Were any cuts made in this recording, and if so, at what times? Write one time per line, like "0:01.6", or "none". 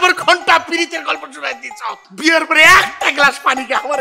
0:02.1